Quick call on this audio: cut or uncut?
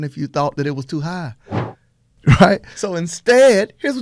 cut